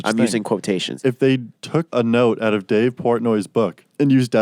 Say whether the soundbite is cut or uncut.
cut